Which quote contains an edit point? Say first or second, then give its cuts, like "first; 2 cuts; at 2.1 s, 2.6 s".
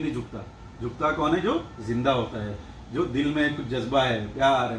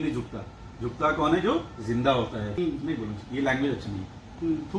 second; 1 cut; at 2.5 s